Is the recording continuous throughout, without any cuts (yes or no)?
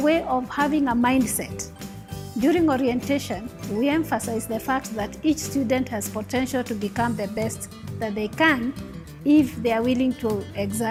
yes